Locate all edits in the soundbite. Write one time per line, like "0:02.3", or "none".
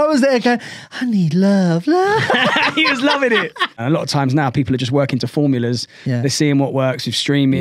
0:03.8